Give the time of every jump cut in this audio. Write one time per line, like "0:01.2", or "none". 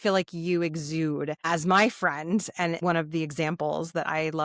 0:01.4
0:02.8